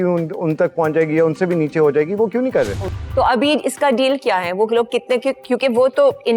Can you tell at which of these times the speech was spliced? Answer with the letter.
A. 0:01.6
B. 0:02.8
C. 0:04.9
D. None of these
B